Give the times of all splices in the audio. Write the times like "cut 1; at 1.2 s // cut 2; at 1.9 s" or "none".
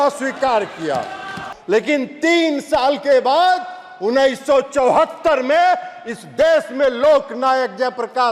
cut 1; at 1.5 s